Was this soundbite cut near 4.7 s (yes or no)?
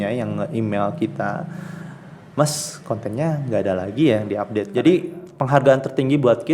yes